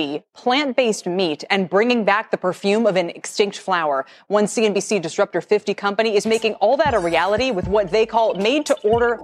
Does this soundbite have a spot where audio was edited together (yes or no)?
no